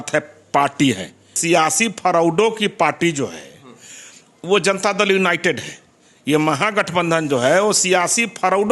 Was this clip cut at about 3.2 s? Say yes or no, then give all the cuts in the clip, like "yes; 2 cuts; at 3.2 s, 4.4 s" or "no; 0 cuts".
no; 1 cut; at 1.4 s